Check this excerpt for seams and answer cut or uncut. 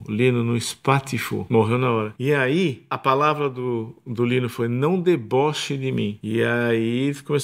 cut